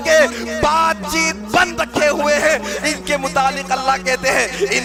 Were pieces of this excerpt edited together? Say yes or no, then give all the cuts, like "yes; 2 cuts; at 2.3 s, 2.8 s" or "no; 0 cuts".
no; 0 cuts